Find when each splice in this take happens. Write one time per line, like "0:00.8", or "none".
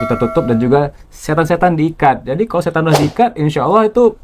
none